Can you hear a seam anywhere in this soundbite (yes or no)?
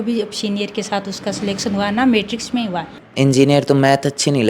yes